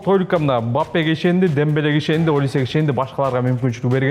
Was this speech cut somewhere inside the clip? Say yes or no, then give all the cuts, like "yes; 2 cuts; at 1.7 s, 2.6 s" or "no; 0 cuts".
no; 0 cuts